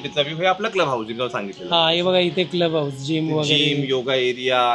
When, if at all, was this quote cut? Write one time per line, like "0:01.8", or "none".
none